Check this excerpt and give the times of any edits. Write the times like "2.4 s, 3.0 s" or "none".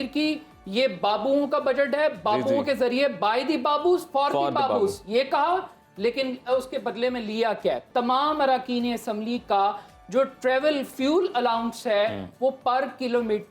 7.9 s

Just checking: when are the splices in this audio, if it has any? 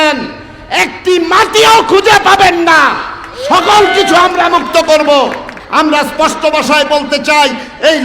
5.5 s

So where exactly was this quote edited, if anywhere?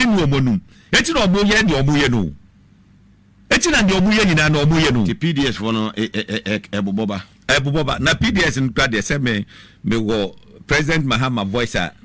1.9 s

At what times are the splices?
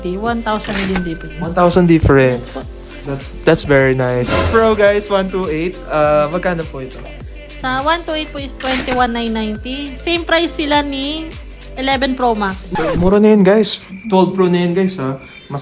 4.4 s, 12.7 s

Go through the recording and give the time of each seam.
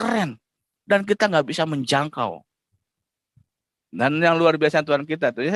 none

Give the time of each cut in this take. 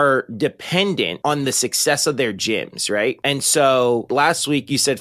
4.1 s

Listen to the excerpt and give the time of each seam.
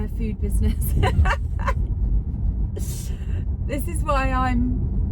none

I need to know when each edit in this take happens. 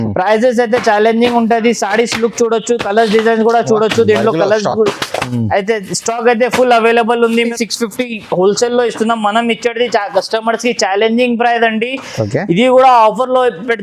7.5 s

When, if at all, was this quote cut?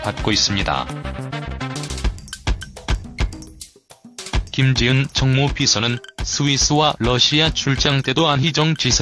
5.3 s

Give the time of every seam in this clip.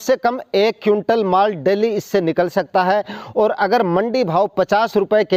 none

